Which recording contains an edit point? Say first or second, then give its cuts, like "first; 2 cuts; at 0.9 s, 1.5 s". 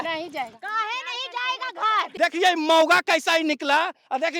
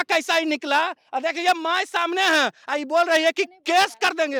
first; 1 cut; at 2.1 s